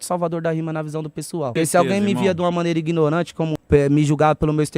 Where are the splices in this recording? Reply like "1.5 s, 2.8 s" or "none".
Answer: 1.5 s, 3.6 s